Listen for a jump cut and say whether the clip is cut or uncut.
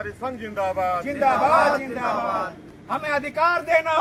uncut